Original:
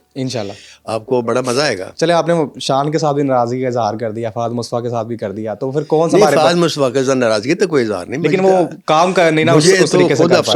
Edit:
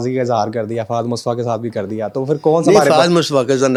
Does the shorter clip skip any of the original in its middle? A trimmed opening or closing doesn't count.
no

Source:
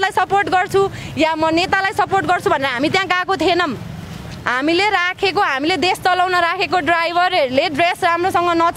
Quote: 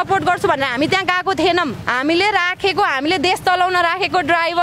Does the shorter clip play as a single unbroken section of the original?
no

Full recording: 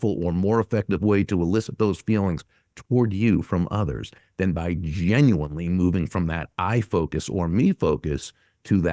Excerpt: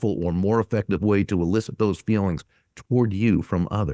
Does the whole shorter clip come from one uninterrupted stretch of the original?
yes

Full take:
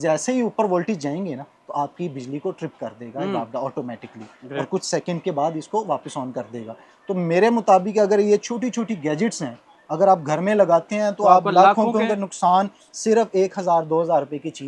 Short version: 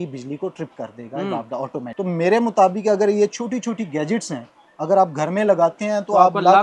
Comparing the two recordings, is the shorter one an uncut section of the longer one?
no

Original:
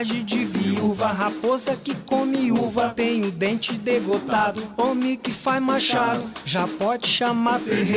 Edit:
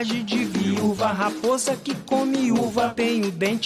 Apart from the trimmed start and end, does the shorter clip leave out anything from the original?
no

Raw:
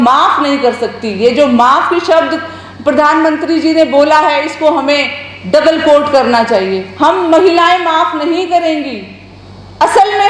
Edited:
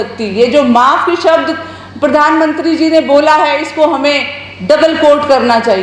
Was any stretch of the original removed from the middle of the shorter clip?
no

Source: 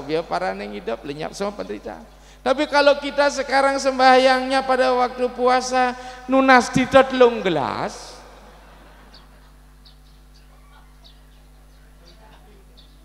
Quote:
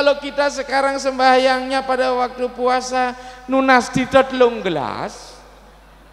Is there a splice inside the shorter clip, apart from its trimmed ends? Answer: no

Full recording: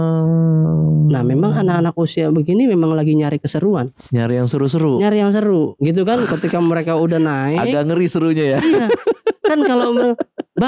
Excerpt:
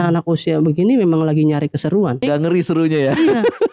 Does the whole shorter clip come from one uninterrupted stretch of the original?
no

